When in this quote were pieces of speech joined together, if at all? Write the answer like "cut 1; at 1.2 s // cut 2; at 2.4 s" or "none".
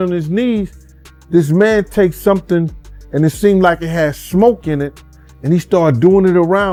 none